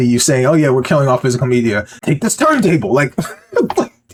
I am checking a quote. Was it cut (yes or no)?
no